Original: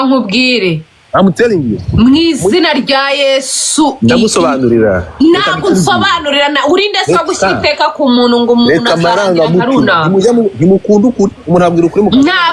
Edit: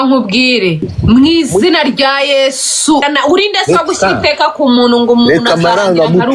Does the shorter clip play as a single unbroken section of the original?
no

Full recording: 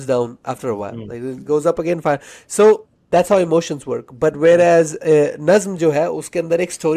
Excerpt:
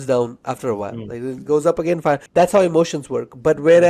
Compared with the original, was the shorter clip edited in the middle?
yes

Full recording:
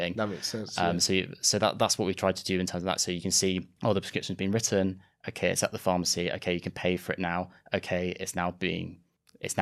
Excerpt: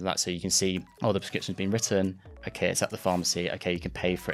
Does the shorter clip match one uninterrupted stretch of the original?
yes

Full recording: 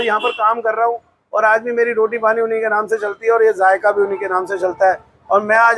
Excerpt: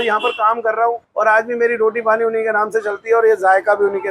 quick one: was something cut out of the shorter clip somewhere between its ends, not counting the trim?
yes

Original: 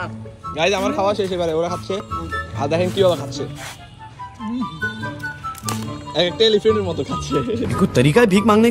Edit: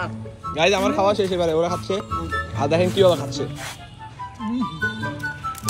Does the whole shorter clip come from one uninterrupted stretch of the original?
yes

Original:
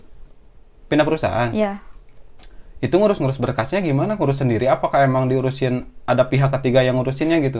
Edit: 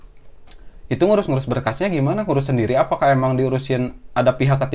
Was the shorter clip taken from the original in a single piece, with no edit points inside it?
yes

